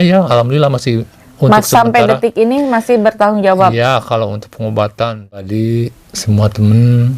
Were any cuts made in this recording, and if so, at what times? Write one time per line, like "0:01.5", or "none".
0:05.1